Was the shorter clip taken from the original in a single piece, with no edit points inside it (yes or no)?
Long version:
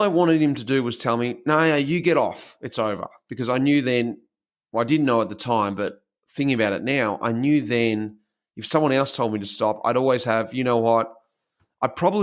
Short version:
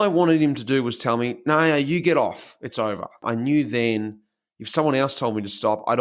no